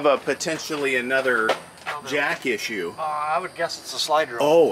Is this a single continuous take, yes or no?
yes